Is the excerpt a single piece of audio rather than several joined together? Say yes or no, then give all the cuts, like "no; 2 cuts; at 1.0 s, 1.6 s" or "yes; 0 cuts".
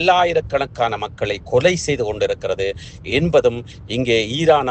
yes; 0 cuts